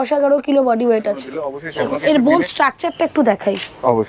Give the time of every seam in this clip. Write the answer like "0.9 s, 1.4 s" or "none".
1.6 s